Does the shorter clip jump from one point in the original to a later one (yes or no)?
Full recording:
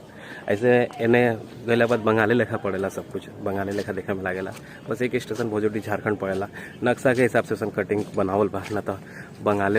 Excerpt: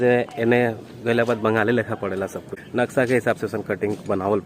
yes